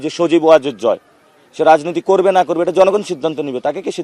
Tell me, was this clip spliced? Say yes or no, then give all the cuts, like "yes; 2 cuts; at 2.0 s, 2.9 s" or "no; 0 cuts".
no; 0 cuts